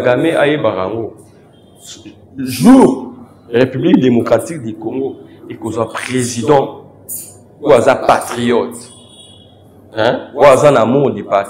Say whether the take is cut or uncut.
uncut